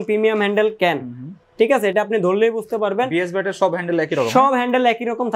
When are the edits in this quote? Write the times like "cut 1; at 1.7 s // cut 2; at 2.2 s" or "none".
none